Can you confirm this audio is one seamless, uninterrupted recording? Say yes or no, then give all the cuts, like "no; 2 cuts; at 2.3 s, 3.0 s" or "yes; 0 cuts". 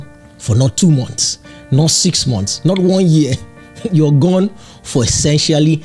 yes; 0 cuts